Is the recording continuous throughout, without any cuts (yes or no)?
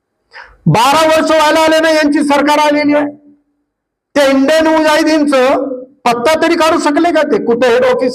yes